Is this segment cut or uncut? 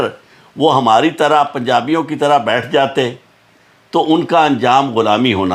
uncut